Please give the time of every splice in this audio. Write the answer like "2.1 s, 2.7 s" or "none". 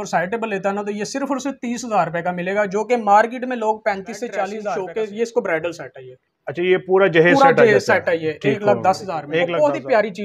4.7 s, 9.3 s